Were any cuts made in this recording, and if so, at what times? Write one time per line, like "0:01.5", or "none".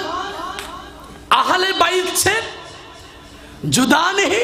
none